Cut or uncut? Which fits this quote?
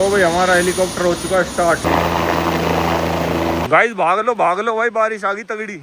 cut